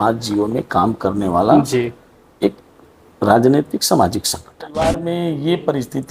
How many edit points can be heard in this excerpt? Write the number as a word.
one